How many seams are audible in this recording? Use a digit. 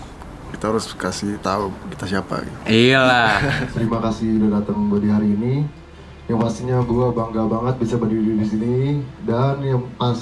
1